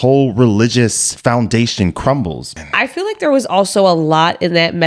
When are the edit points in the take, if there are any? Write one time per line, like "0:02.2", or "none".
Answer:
0:01.1
0:02.6